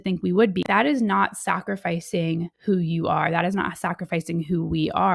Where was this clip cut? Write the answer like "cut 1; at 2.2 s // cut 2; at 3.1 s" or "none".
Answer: cut 1; at 2.5 s